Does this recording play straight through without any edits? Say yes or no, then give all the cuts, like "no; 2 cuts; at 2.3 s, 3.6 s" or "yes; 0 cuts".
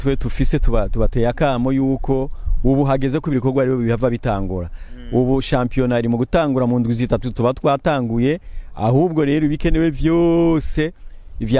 yes; 0 cuts